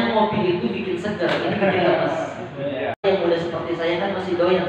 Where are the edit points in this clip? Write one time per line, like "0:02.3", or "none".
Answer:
0:03.0